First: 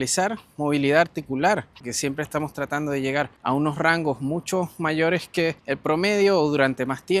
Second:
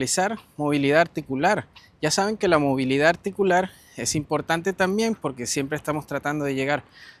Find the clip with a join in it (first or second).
first